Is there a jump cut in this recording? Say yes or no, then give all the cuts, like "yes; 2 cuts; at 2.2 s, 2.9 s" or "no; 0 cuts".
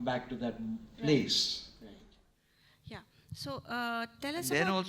no; 0 cuts